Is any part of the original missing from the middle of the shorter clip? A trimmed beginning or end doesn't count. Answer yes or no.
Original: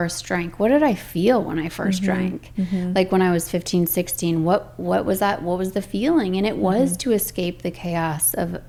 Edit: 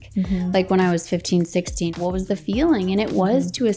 yes